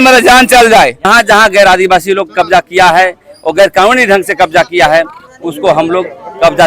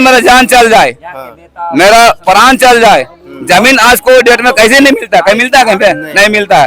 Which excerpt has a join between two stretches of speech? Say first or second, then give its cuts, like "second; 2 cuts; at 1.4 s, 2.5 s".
first; 1 cut; at 1.1 s